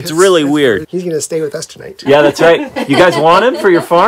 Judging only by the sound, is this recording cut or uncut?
cut